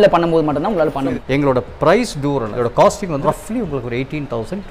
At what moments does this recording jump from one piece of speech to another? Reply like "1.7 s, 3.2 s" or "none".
1.1 s, 2.5 s, 3.2 s